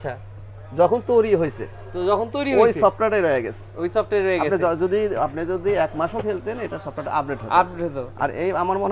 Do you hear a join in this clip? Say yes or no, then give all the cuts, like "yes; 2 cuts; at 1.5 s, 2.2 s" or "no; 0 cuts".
no; 0 cuts